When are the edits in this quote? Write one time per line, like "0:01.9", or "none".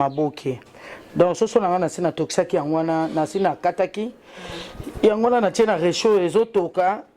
none